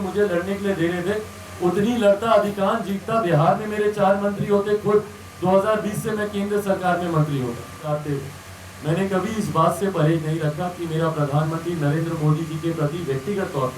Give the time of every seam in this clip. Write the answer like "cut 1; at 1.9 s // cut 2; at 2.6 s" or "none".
cut 1; at 7.8 s